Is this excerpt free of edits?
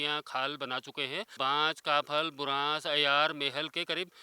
no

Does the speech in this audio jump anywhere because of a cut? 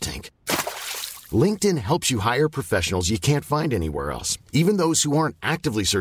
no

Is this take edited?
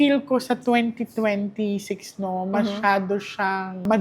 no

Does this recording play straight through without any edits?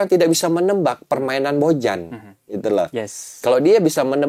yes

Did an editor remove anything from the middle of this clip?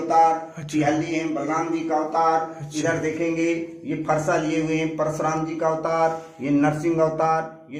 no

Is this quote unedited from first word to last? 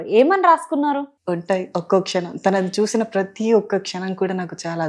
yes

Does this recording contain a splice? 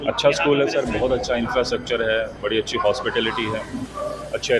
no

